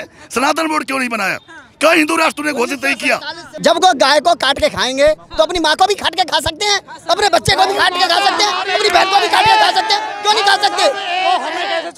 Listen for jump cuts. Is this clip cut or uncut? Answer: cut